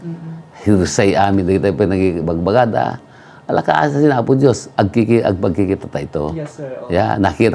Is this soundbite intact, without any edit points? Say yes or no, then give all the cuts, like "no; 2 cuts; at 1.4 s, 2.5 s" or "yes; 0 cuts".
yes; 0 cuts